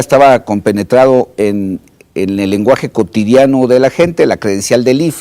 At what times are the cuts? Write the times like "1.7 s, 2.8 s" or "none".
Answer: 3.5 s